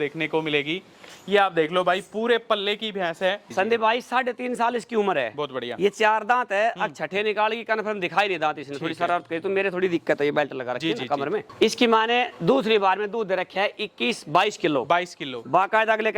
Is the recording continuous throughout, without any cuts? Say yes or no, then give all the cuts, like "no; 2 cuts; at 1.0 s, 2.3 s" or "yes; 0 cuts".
no; 2 cuts; at 3.5 s, 11.5 s